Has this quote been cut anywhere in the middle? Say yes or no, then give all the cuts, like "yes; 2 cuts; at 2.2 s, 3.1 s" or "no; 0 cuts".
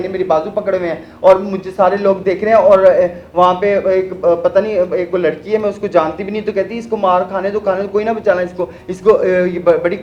no; 0 cuts